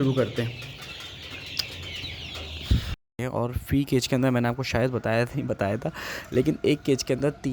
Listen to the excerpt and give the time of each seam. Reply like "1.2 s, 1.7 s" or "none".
2.9 s